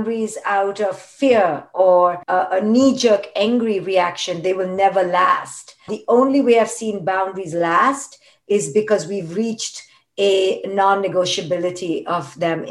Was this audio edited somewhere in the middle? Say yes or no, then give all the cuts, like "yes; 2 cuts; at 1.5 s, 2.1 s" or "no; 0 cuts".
yes; 2 cuts; at 2.2 s, 5.9 s